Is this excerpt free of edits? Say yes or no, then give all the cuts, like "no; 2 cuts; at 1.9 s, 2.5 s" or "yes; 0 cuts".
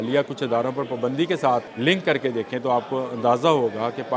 no; 1 cut; at 1.7 s